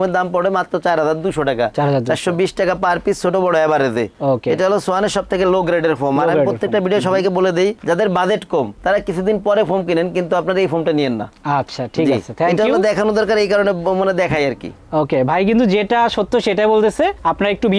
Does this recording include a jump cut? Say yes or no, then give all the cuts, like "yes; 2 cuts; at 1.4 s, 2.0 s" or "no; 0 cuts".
no; 0 cuts